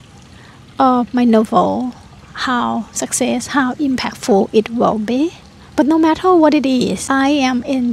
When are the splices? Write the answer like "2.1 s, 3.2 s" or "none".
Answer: none